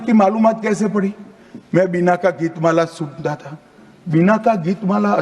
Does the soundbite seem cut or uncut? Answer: uncut